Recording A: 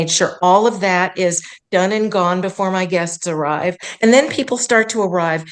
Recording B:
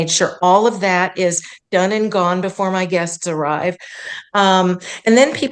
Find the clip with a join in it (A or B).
A